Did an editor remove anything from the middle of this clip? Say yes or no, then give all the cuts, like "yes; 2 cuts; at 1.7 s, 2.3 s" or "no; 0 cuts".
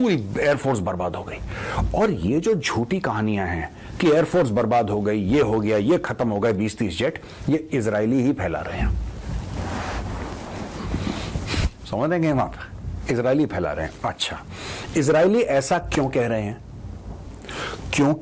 no; 0 cuts